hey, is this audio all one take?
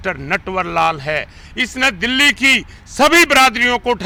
yes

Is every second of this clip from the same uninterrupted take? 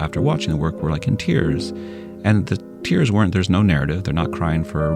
yes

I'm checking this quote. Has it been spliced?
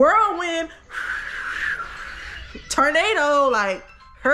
no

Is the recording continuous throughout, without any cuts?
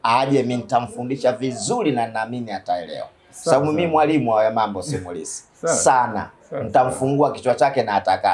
yes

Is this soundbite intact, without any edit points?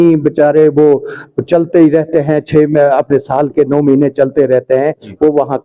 yes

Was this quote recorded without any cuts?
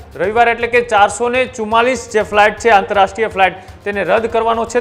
yes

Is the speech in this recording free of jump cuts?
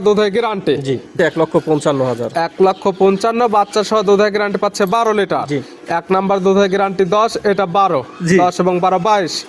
no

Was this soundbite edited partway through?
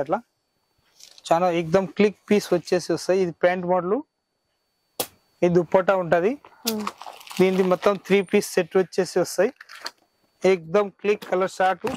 no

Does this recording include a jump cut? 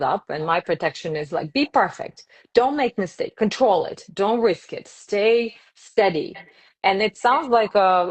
no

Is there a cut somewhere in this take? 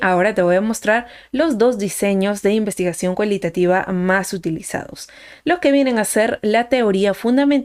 no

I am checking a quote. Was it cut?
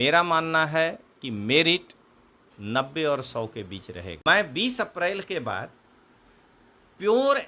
yes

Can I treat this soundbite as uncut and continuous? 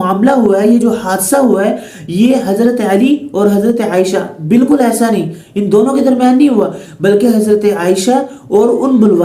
yes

